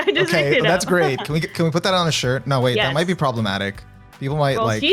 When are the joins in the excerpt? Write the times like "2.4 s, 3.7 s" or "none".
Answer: none